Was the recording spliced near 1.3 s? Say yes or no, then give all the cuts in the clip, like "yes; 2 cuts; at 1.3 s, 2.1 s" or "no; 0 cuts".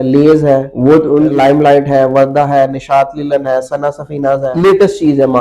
yes; 2 cuts; at 1.3 s, 4.5 s